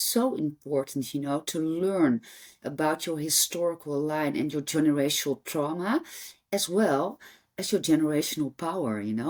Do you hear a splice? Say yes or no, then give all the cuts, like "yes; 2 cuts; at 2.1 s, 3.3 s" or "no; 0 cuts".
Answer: no; 0 cuts